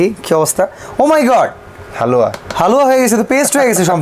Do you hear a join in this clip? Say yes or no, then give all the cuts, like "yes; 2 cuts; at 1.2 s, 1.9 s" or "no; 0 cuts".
no; 0 cuts